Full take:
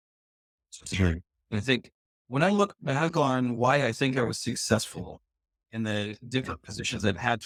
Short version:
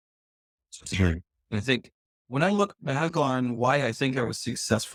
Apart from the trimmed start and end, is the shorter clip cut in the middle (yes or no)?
no